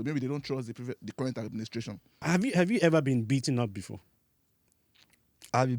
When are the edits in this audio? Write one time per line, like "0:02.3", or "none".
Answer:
0:02.2